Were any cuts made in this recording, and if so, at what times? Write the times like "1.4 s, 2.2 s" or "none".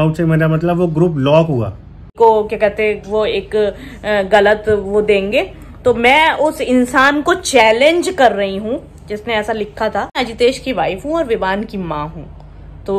2.1 s, 10.2 s

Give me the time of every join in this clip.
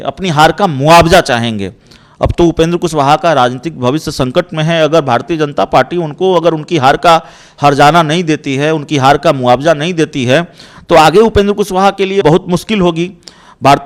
none

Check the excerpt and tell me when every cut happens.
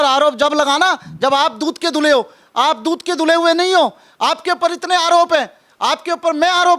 none

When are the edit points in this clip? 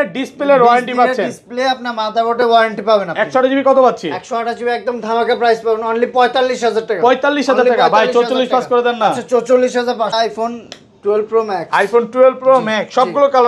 10.1 s

